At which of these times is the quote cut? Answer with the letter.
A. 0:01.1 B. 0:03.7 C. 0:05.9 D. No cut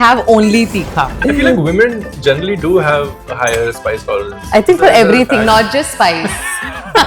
A